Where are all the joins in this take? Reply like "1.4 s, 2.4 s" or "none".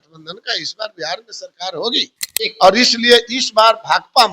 2.2 s